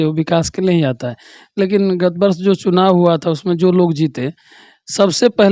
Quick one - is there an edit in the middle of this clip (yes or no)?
no